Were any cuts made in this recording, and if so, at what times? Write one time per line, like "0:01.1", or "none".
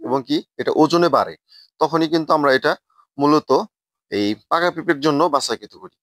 none